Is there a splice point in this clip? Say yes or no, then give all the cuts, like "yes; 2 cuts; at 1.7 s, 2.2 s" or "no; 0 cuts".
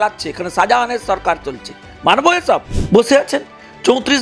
yes; 1 cut; at 2.7 s